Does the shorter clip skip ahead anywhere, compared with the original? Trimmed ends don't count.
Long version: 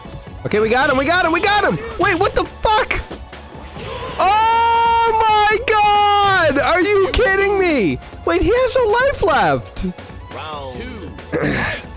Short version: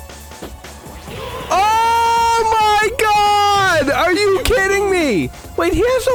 no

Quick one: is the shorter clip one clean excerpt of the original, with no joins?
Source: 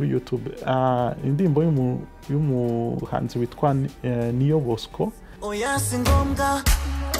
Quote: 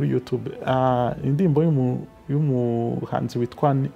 yes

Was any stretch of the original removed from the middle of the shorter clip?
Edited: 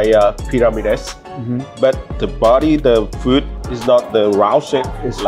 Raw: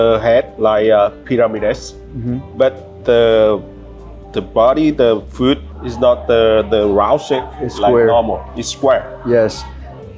yes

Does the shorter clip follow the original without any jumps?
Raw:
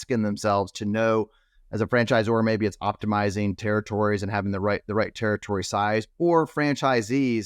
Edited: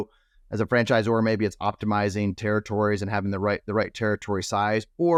yes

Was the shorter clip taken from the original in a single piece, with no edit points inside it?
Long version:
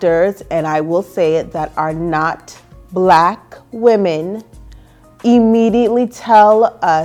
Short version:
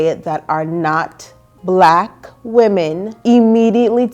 no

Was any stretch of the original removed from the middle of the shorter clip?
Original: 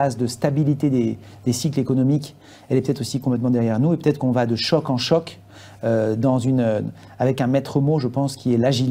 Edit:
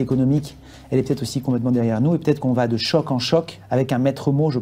yes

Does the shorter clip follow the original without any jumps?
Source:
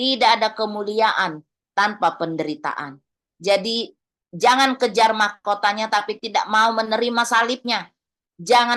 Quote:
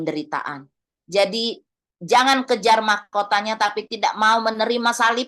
yes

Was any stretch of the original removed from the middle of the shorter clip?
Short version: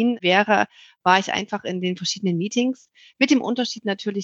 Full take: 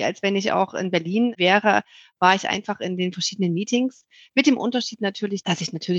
no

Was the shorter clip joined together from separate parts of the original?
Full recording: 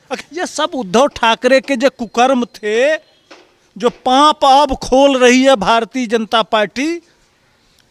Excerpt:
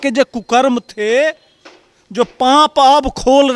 no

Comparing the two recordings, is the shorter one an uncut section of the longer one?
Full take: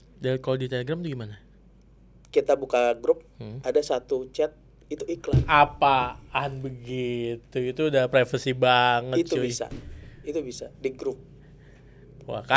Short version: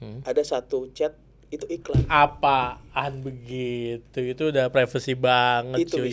yes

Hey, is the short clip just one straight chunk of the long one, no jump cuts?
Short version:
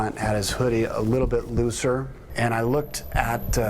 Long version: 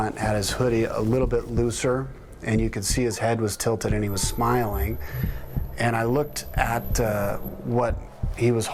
no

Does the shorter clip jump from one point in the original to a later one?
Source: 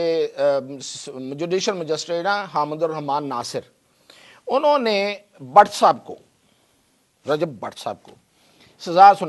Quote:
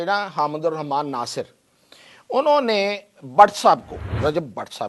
yes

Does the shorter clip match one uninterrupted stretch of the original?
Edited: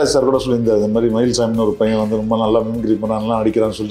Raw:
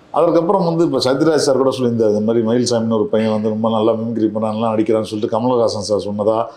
yes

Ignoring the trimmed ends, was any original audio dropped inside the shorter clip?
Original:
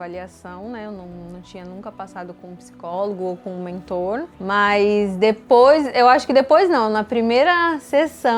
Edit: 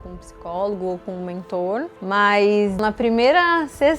yes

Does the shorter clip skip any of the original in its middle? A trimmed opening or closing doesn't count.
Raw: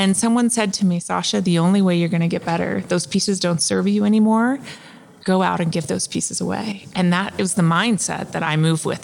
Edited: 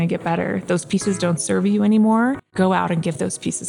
yes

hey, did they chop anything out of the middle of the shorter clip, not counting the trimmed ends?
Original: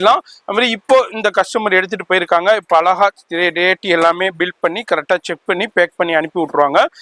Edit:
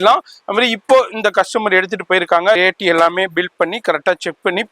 yes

